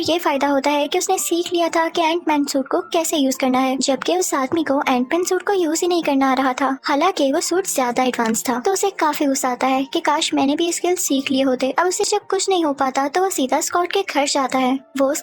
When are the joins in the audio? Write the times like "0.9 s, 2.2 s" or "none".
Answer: none